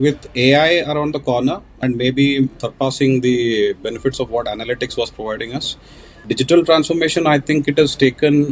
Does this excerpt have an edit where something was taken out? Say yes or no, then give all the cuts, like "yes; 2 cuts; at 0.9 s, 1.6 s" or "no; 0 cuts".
yes; 3 cuts; at 1.7 s, 2.6 s, 6.2 s